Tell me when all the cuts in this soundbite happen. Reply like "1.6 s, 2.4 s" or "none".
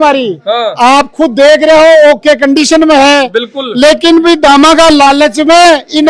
none